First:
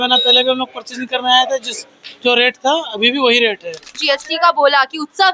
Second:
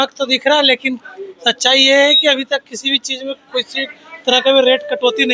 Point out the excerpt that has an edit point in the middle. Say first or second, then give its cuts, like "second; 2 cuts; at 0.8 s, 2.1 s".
first; 1 cut; at 4.0 s